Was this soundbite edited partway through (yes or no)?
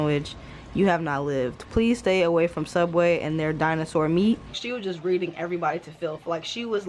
yes